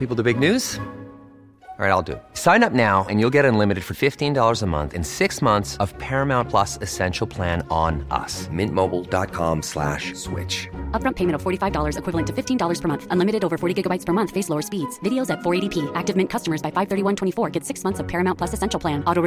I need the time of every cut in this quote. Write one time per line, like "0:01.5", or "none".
none